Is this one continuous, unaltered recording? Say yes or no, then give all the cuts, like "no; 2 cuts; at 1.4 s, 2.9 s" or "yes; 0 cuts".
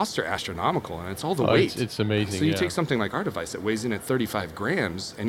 no; 1 cut; at 2.3 s